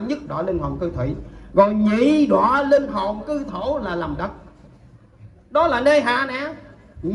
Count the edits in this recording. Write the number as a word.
zero